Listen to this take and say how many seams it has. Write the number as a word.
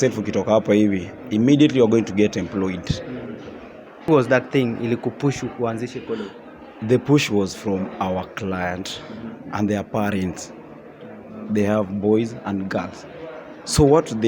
one